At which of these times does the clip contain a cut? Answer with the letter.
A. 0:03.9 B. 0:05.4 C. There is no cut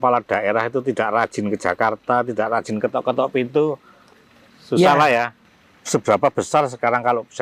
B